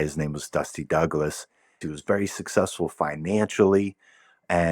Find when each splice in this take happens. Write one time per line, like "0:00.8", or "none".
0:01.8